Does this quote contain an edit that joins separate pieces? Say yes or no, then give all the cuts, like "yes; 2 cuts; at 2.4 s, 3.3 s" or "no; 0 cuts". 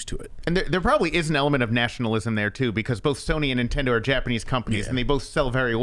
no; 0 cuts